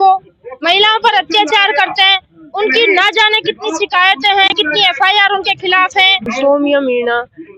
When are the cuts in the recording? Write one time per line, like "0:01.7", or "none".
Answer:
0:06.3